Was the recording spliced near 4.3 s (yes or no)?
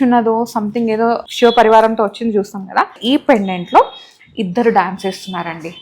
no